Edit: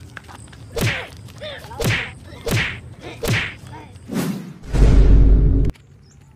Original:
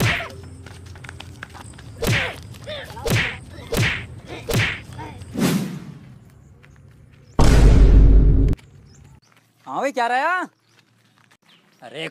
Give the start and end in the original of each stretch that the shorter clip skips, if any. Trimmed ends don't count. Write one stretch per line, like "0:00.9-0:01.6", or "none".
0:06.0-0:07.6

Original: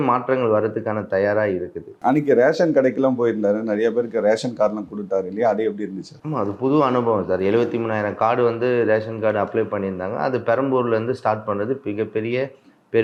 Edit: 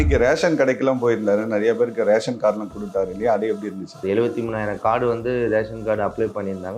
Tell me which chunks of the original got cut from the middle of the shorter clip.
0:06.2-0:07.4

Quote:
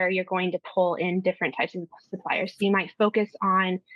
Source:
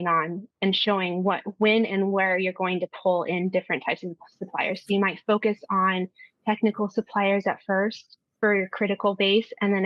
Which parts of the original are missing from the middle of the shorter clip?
none

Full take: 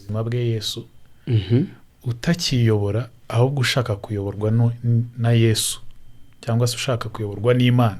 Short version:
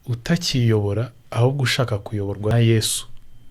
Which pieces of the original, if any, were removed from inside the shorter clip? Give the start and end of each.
0:04.5-0:05.3

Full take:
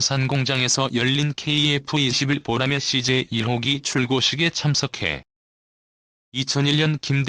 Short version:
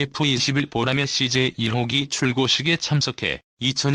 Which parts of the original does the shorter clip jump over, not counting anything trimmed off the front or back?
0:04.8-0:05.8

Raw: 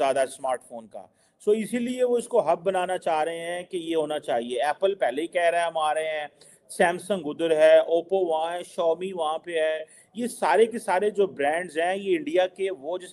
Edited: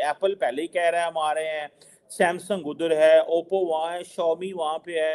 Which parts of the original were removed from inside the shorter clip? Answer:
none

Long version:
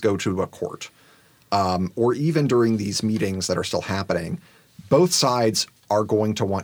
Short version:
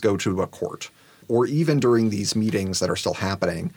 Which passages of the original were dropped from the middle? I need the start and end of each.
0:01.2-0:01.9

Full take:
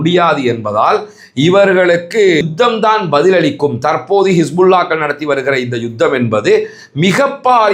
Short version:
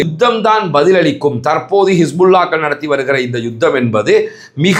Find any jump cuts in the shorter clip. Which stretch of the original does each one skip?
none

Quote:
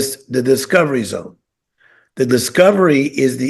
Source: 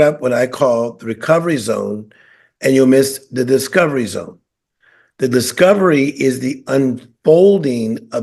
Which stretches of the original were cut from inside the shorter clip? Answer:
none

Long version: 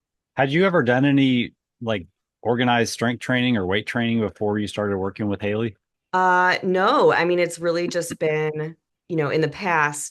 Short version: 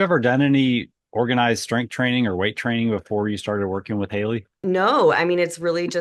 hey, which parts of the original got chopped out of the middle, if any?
0:01.6-0:02.3
0:05.9-0:06.6

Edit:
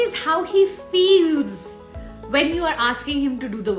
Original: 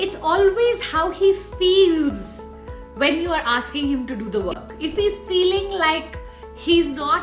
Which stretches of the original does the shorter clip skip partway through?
none

